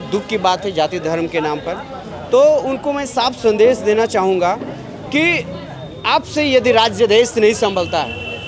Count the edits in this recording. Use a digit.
0